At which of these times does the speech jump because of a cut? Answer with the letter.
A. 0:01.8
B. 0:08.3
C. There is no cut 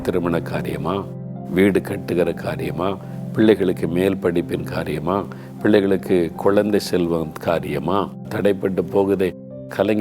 B